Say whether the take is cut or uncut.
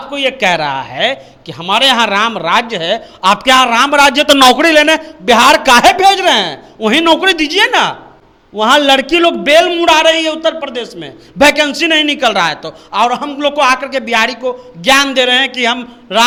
uncut